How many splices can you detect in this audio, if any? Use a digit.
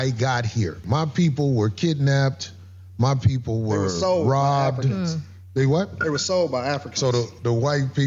1